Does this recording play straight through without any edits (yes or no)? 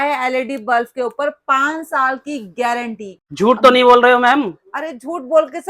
no